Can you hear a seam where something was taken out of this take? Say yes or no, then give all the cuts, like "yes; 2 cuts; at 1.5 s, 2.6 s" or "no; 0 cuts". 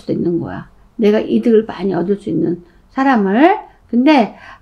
no; 0 cuts